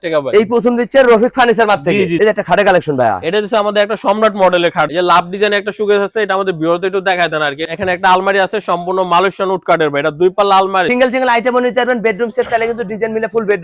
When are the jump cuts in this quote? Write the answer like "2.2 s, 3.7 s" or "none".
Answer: 2.2 s, 4.9 s, 7.6 s, 10.9 s